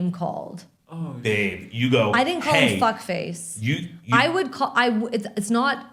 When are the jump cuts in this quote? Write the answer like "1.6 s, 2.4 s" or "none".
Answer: none